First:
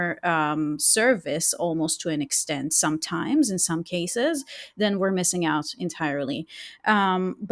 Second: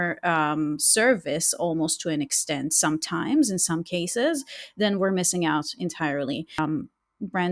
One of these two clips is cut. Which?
second; 1 cut; at 6.6 s

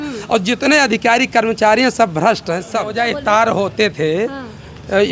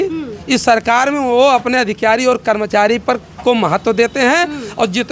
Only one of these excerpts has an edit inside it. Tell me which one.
first; 1 cut; at 2.9 s

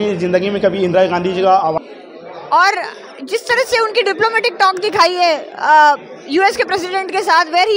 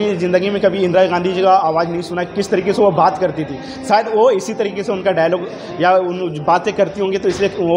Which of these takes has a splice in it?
first; 1 cut; at 1.8 s

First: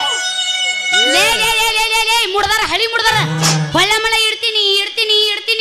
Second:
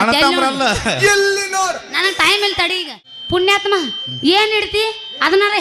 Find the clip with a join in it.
second; 1 cut; at 3.1 s

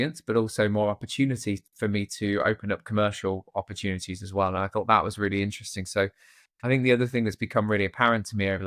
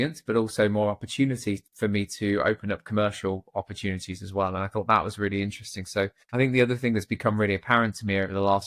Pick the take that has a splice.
second; 1 cut; at 6.2 s

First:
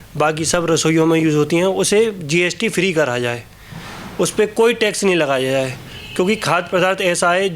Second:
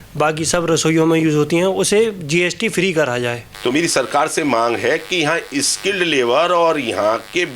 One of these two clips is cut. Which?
second; 1 cut; at 3.5 s

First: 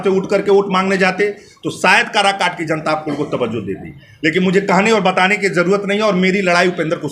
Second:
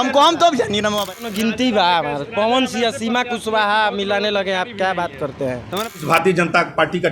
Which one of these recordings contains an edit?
second; 2 cuts; at 1.2 s, 6.0 s

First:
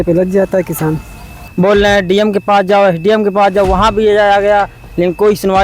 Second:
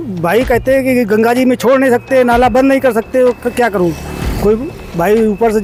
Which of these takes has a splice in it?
first; 1 cut; at 1.4 s

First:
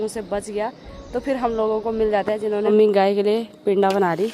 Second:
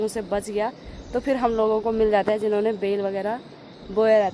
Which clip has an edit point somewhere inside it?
first; 1 cut; at 2.8 s

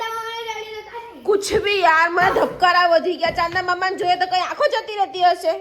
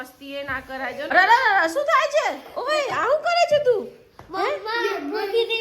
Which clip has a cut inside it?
second; 1 cut; at 1.1 s

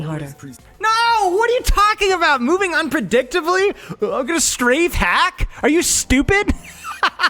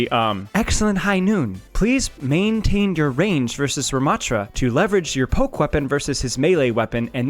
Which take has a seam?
second; 2 cuts; at 1.6 s, 4.5 s

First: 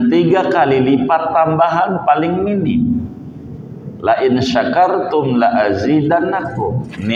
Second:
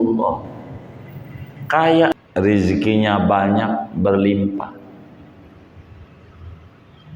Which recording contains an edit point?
second; 1 cut; at 2.1 s

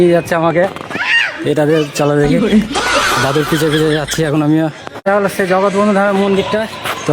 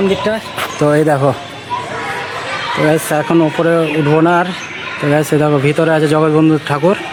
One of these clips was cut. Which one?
first; 1 cut; at 4.9 s

